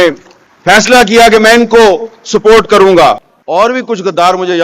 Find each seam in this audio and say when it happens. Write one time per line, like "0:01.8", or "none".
0:03.3